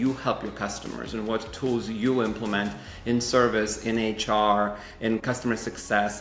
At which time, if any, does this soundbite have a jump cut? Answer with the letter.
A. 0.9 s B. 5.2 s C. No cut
B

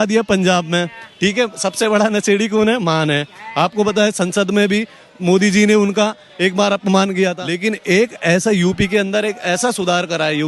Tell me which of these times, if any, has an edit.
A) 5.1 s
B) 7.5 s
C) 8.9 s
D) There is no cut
B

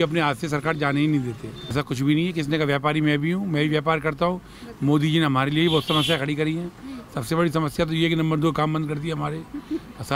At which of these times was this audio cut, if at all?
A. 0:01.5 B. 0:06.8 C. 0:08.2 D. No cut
A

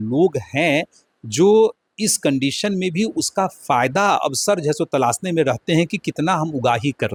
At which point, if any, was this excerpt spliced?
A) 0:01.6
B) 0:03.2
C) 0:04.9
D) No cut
D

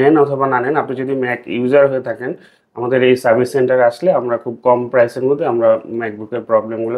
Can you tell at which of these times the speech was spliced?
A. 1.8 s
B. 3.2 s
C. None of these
C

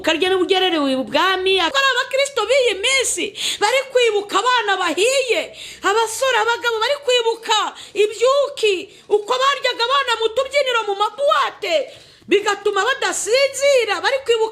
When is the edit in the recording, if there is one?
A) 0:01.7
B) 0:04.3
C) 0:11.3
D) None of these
A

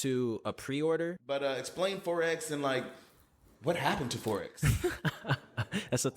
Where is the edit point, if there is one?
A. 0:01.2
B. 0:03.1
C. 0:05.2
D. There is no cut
A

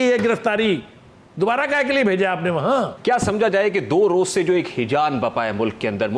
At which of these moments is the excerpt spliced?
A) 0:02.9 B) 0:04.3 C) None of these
A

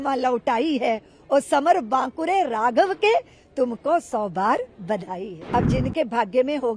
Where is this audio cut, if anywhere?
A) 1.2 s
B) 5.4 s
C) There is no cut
B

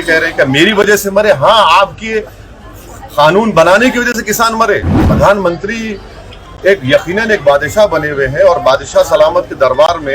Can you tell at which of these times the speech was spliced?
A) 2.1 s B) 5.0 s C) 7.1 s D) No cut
B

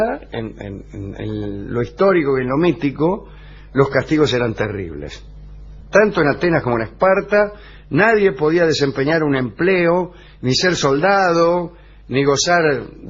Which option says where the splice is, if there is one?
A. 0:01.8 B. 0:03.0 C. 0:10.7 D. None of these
A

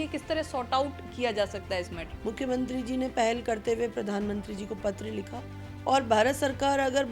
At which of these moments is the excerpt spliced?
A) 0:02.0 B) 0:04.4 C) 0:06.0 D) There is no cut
A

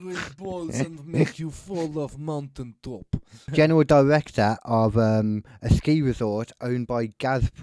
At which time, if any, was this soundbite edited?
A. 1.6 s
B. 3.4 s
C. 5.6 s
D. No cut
B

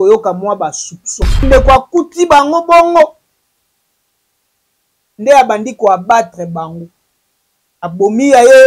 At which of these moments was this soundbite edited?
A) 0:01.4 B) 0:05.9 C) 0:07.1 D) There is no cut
A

